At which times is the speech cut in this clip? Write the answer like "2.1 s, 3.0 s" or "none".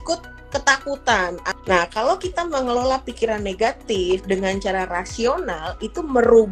1.5 s